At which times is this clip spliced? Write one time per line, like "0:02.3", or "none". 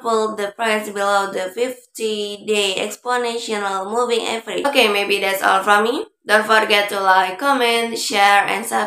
none